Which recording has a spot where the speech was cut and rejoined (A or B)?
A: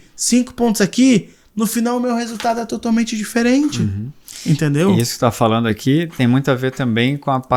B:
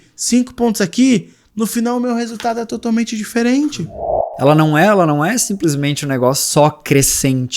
B